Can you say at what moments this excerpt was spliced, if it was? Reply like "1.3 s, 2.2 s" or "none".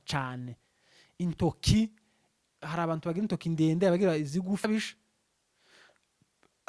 4.6 s